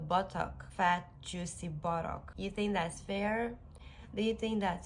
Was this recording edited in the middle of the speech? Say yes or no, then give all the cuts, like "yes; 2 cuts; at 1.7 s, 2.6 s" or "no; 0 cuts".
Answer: yes; 2 cuts; at 0.8 s, 2.3 s